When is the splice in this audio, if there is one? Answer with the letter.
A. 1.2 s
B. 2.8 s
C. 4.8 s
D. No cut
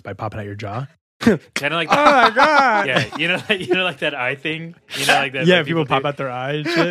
A